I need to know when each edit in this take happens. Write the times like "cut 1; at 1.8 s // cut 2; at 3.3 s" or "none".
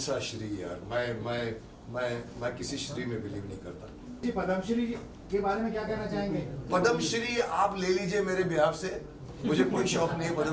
cut 1; at 4.2 s

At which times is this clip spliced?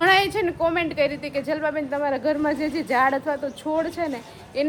none

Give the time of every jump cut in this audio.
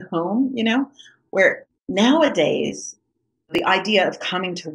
cut 1; at 1.7 s // cut 2; at 3.6 s

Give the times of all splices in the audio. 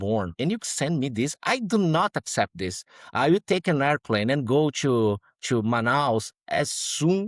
none

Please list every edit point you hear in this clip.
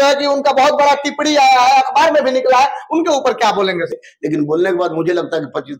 cut 1; at 3.9 s

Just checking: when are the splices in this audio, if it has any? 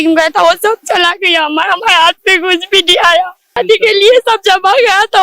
cut 1; at 3.6 s

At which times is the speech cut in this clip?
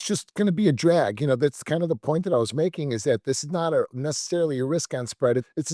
cut 1; at 3.2 s

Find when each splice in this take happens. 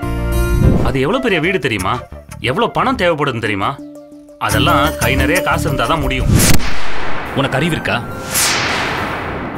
cut 1; at 0.8 s // cut 2; at 6.3 s

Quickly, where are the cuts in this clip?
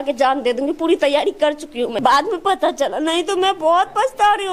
cut 1; at 2.0 s

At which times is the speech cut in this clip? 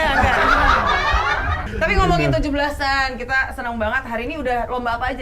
cut 1; at 1.6 s

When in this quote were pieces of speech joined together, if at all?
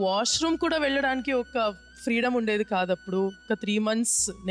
cut 1; at 3.4 s

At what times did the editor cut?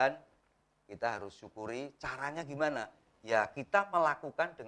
none

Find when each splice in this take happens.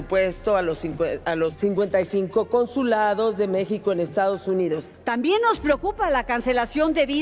cut 1; at 1.5 s // cut 2; at 4.9 s

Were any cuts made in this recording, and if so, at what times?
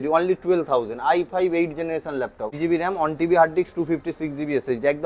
cut 1; at 2.5 s

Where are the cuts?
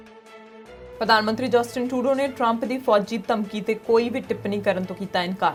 none

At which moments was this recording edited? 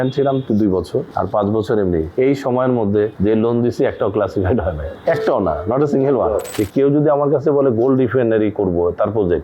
cut 1; at 1.1 s // cut 2; at 2.1 s // cut 3; at 3.1 s // cut 4; at 4.9 s // cut 5; at 6.5 s

